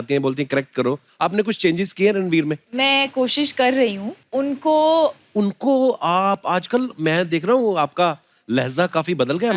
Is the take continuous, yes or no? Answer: no